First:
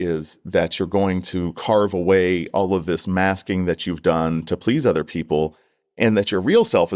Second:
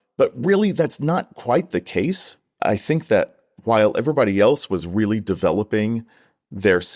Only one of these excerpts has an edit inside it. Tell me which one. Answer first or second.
second